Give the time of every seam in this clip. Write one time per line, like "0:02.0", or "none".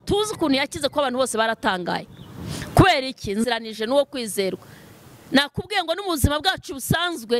0:03.5